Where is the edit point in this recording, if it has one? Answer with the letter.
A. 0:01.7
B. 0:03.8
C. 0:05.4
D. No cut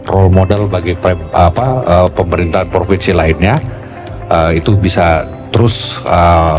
D